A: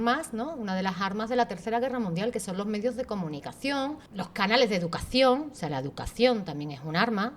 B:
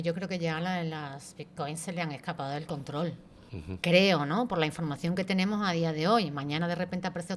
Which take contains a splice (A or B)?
A